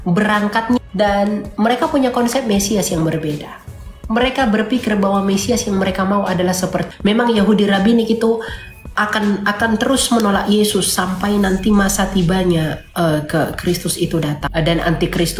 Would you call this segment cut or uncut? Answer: cut